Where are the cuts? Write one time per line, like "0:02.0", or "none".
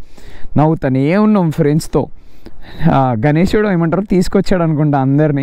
none